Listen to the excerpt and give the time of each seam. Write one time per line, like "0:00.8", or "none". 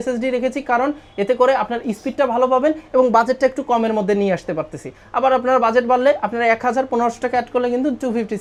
none